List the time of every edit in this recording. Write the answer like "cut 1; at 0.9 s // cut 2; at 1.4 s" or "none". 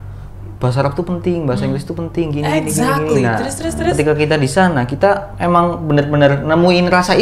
none